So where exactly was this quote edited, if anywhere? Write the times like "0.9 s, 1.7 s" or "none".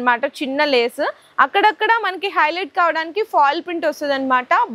1.2 s

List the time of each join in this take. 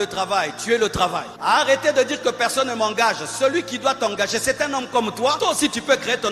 1.3 s, 5.4 s

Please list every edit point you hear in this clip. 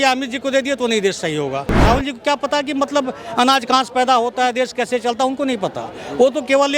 1.7 s

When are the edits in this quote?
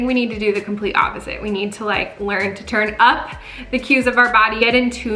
none

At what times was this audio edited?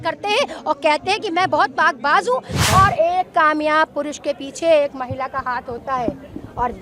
2.6 s

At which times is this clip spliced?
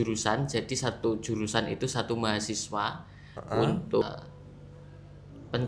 4.0 s

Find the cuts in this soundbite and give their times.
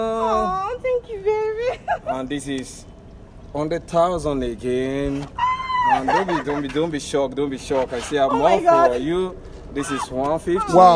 none

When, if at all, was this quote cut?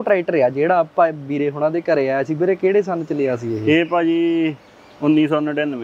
none

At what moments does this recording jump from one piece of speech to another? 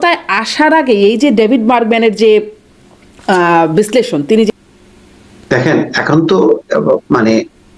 4.5 s

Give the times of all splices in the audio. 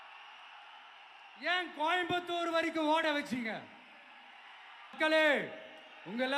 5.0 s

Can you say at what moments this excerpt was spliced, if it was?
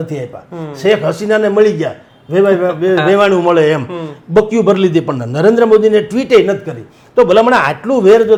none

